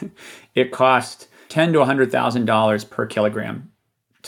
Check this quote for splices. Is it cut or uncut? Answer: uncut